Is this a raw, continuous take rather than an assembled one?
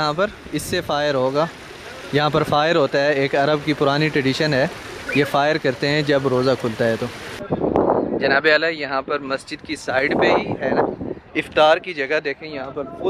yes; 0 cuts

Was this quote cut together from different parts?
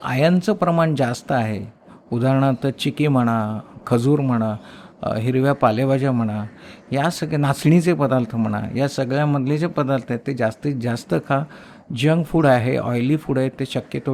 no; 0 cuts

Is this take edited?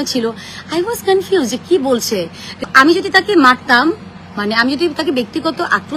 yes; 1 cut; at 2.7 s

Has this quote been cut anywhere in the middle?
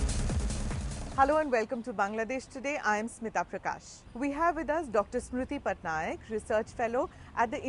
yes; 1 cut; at 6.8 s

